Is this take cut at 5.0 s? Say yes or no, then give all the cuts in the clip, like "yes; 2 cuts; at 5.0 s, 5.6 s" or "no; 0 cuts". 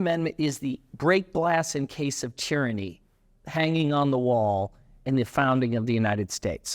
yes; 1 cut; at 5.0 s